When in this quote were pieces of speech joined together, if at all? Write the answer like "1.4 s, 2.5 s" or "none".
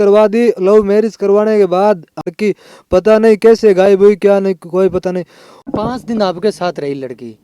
2.2 s, 5.7 s